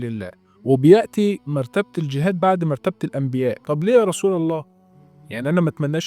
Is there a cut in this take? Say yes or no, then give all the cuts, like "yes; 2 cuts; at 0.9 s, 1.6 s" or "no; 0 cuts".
yes; 1 cut; at 3.6 s